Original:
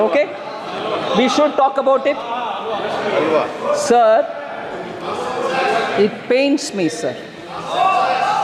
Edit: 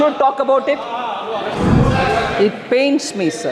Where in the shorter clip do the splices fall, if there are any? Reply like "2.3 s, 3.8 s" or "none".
1.5 s